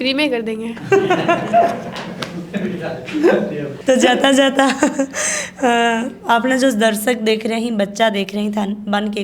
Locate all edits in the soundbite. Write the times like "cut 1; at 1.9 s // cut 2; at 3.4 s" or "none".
none